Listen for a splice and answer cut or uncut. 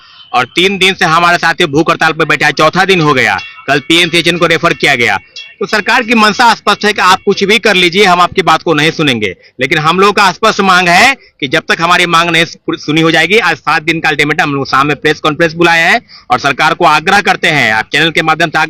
uncut